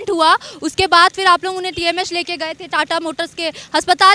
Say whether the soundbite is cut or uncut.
uncut